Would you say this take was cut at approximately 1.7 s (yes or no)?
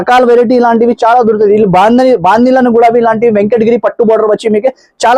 no